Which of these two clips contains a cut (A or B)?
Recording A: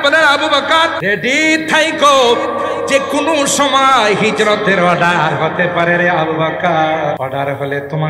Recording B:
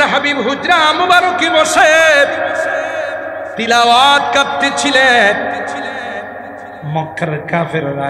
A